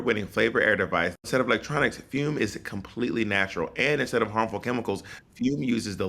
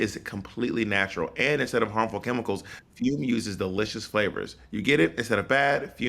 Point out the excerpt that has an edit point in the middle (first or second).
first